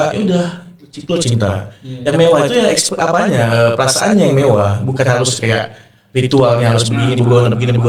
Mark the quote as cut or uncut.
uncut